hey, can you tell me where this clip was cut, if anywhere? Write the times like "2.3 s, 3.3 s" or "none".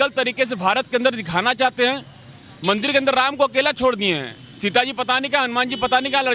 none